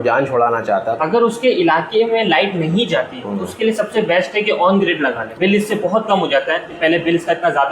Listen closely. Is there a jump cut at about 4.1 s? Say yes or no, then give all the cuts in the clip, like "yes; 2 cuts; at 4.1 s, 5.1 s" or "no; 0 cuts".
no; 3 cuts; at 1.0 s, 5.3 s, 6.7 s